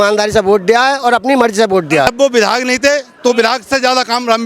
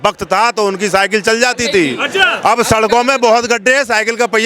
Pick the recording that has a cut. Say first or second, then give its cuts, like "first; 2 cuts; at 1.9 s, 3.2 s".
first; 1 cut; at 2.1 s